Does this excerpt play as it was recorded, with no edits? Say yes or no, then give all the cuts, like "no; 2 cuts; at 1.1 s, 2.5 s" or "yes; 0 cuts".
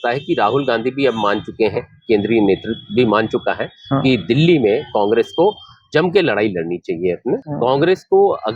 no; 1 cut; at 7.5 s